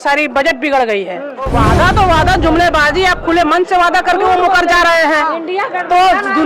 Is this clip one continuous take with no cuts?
no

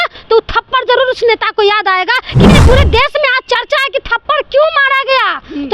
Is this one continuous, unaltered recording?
no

